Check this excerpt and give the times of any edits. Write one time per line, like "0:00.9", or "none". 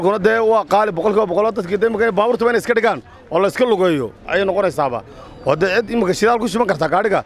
0:04.2